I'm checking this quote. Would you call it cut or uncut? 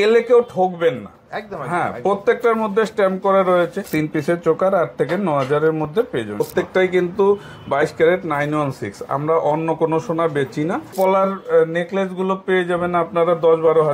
cut